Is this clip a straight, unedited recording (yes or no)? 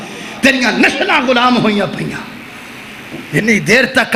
yes